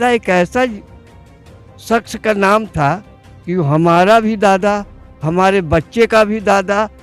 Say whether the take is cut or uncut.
uncut